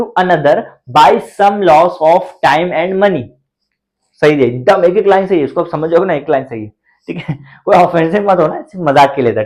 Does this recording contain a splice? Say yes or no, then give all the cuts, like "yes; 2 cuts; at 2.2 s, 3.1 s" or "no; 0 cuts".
no; 0 cuts